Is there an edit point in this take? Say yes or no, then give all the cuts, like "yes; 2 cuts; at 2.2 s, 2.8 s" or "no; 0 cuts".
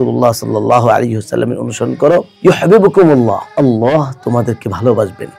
yes; 1 cut; at 3.4 s